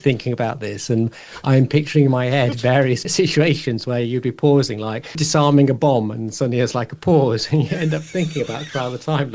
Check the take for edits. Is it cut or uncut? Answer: cut